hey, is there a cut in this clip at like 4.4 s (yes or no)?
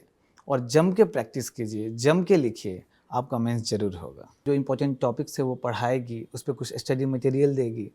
yes